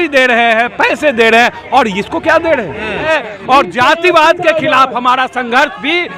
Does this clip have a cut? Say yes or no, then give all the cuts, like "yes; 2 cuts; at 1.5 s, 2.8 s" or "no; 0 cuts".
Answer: yes; 1 cut; at 3.1 s